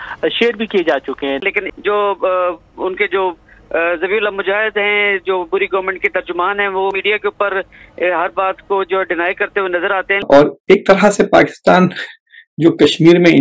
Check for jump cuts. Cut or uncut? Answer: cut